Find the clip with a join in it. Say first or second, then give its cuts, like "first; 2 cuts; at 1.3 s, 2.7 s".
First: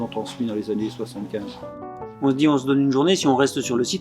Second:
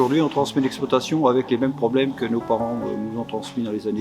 first; 1 cut; at 1.8 s